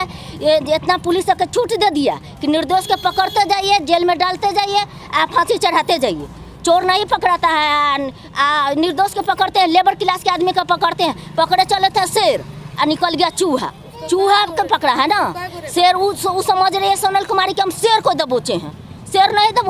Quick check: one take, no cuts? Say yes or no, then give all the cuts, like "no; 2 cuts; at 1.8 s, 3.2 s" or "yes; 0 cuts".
yes; 0 cuts